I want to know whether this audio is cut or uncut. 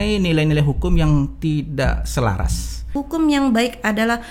cut